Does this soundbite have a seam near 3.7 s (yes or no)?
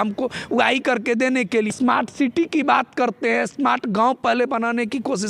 no